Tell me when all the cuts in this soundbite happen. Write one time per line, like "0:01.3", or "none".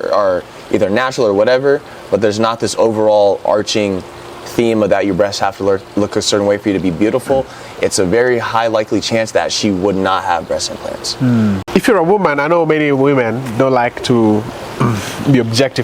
0:11.6